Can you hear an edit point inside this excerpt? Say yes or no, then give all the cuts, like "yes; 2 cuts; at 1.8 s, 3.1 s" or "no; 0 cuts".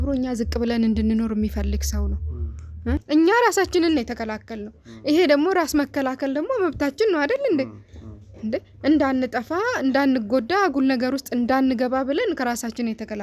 yes; 1 cut; at 3.0 s